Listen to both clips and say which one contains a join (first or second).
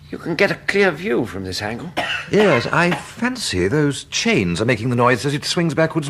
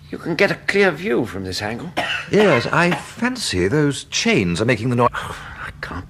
first